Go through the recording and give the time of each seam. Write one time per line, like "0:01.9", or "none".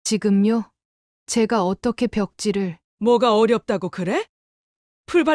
0:02.8